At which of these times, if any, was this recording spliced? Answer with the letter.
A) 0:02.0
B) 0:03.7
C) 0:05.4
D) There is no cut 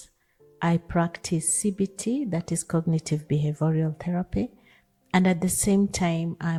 D